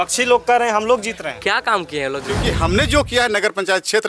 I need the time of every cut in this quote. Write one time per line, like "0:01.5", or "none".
0:02.4